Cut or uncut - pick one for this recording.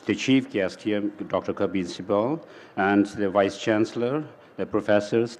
uncut